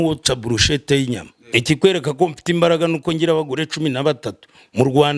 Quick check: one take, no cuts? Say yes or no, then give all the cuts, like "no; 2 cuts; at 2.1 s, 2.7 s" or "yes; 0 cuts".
no; 1 cut; at 1.5 s